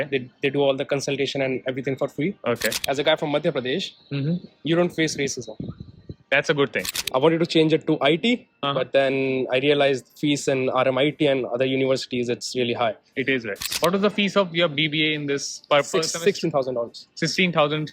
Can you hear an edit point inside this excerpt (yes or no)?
yes